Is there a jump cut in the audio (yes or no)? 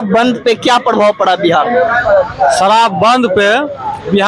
no